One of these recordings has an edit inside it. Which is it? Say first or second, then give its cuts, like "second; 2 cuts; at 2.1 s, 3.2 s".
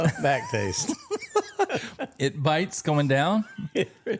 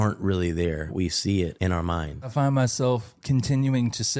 second; 2 cuts; at 0.9 s, 2.3 s